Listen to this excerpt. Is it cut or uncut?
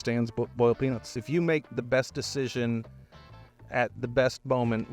cut